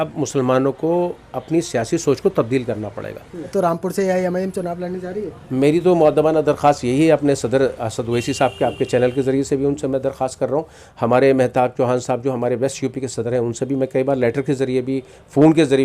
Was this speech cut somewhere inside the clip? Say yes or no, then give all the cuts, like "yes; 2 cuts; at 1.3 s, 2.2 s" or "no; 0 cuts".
yes; 1 cut; at 3.4 s